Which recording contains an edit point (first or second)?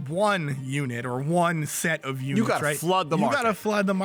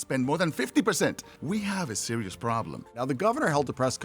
second